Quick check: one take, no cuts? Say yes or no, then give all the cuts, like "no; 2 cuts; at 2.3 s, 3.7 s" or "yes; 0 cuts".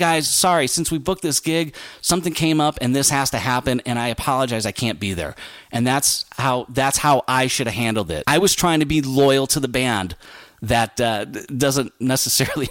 no; 1 cut; at 8.2 s